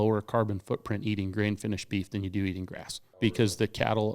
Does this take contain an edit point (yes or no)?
yes